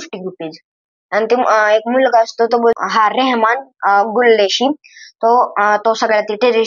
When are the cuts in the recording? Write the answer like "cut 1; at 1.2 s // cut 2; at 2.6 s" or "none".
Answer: cut 1; at 2.8 s